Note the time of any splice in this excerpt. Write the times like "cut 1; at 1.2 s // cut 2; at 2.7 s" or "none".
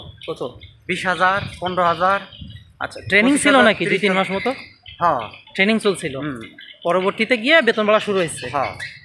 none